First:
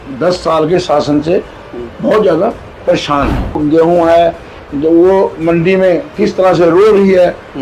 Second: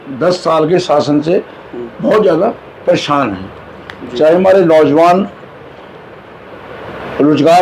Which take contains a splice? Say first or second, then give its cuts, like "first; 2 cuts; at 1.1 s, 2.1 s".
first; 1 cut; at 3.6 s